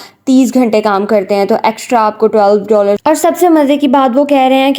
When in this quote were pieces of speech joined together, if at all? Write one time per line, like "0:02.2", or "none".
0:03.0